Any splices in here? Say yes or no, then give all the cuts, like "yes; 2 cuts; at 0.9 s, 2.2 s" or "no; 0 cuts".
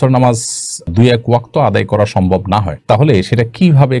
no; 0 cuts